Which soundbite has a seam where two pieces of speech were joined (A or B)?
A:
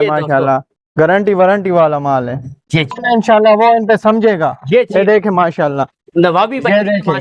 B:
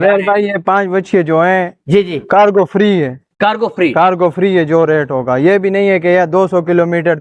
A